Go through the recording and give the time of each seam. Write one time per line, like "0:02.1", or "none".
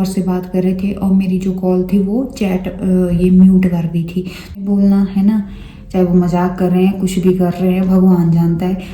0:04.6